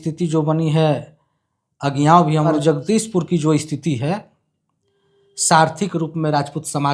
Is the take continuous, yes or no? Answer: no